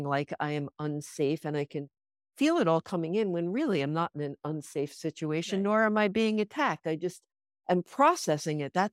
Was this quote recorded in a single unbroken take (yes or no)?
yes